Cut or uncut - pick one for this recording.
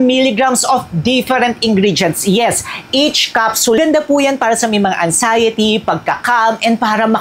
cut